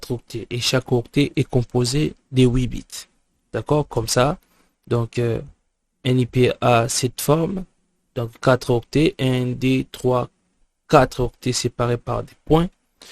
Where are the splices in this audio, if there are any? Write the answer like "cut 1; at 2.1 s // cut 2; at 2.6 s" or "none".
cut 1; at 4.2 s